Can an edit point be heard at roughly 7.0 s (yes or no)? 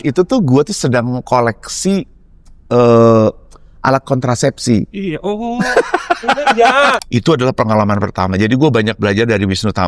yes